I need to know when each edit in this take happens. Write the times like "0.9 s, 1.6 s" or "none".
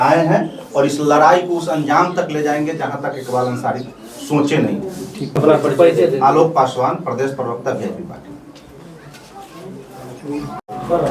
none